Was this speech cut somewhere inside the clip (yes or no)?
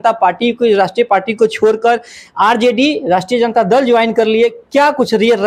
no